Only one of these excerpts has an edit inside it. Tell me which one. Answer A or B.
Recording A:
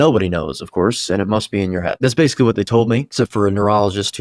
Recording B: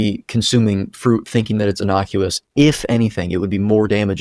A